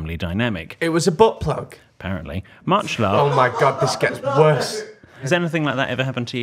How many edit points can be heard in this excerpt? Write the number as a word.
one